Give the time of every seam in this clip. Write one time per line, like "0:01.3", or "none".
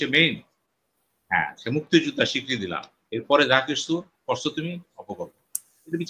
none